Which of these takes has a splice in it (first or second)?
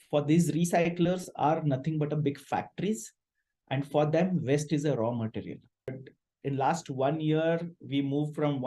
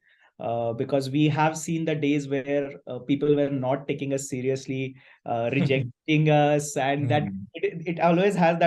first